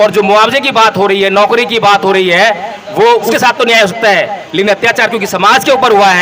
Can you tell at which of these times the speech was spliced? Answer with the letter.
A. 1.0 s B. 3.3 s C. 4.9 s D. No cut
B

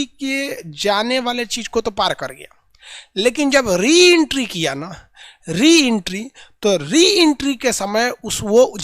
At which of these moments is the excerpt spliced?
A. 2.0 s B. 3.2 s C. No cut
C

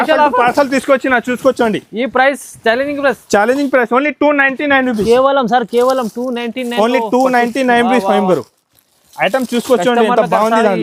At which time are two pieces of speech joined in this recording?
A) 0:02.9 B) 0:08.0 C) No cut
C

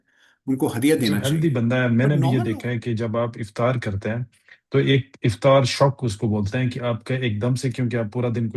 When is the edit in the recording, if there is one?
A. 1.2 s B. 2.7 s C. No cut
A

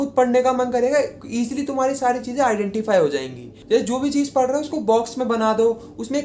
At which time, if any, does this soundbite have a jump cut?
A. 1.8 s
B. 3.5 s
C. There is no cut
B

